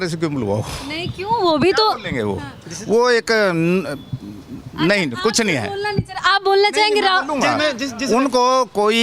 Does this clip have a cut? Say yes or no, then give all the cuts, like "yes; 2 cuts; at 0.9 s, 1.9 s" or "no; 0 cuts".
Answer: no; 0 cuts